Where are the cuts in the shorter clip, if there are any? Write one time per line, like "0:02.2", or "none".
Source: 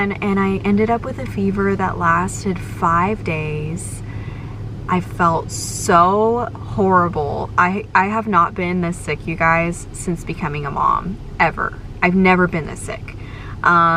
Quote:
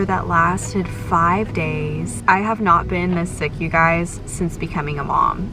0:02.2